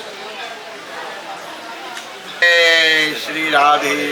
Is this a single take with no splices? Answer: no; 1 cut; at 2.4 s

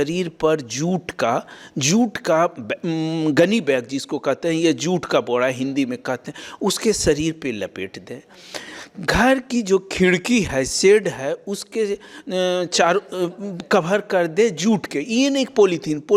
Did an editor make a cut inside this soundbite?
no; 0 cuts

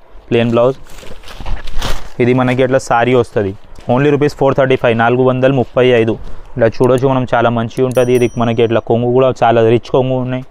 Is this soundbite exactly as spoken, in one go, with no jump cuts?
yes; 0 cuts

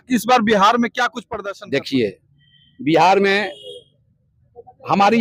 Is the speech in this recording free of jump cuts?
no; 1 cut; at 1.2 s

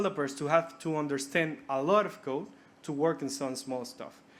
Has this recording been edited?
no; 0 cuts

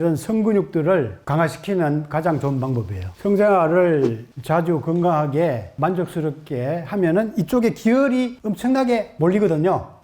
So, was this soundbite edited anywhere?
no; 0 cuts

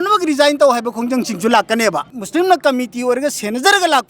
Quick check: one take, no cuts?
no; 1 cut; at 2.2 s

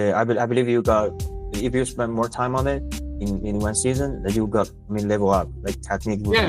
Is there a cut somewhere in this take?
no; 0 cuts

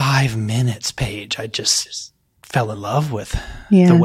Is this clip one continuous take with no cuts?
yes; 0 cuts

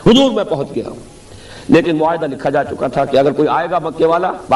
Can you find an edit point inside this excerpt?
no; 0 cuts

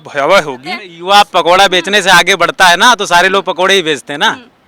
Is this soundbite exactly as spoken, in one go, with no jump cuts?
no; 1 cut; at 0.9 s

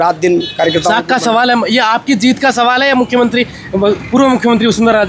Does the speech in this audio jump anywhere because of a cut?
no; 0 cuts

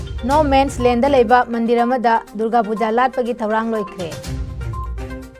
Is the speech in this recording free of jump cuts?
yes; 0 cuts

